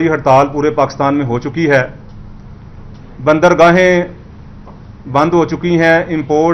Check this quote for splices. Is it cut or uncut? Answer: uncut